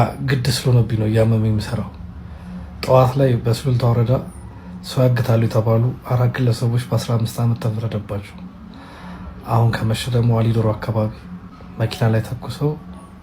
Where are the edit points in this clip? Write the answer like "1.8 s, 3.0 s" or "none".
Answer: none